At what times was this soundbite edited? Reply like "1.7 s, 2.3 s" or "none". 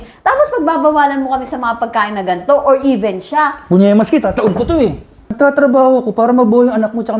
5.2 s